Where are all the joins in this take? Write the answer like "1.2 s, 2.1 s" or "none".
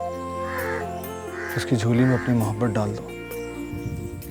none